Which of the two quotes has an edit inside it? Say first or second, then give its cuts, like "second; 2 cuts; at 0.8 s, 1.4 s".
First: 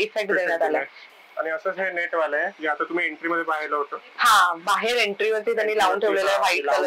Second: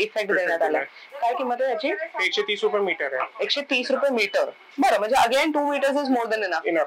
first; 1 cut; at 1.0 s